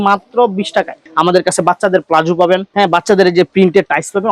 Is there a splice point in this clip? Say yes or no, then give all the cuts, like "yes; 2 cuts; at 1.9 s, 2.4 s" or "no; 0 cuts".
yes; 1 cut; at 1.0 s